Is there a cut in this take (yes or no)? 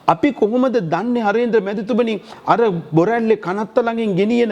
no